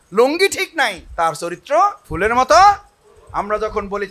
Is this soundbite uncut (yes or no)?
no